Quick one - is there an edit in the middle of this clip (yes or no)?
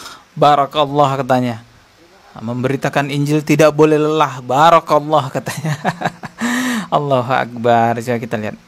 no